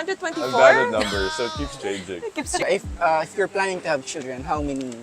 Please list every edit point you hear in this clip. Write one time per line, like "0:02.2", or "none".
0:02.6